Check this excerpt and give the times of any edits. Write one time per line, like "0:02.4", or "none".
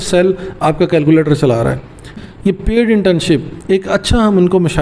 0:02.2